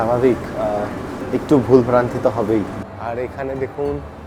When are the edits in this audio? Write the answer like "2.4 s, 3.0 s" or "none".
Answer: 2.9 s